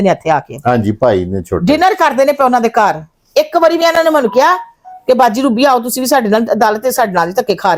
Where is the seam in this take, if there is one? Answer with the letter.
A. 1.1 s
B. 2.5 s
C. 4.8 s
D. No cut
D